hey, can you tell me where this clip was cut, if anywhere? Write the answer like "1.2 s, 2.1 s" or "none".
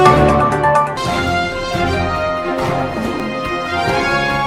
none